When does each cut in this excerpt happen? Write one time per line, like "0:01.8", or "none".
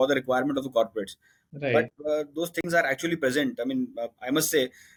none

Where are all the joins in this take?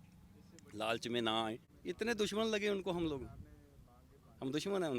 0:01.7

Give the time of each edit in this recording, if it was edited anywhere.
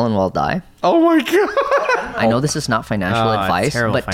0:01.9

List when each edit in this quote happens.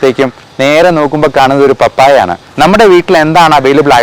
0:02.4

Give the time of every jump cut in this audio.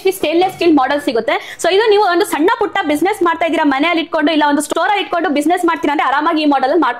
none

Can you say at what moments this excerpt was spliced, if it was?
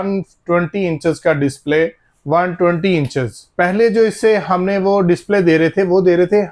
0:02.1
0:03.4

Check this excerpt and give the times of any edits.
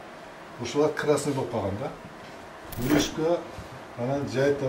0:02.6

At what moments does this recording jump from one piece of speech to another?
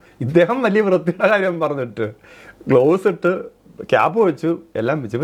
none

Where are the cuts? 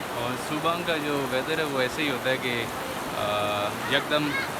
none

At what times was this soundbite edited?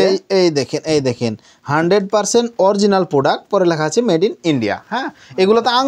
none

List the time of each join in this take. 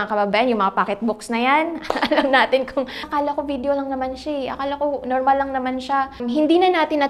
0:03.1
0:06.2

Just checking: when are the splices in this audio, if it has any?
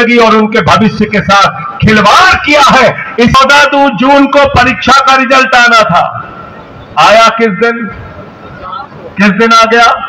0:03.3

